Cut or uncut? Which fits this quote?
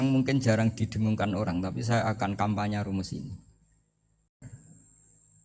cut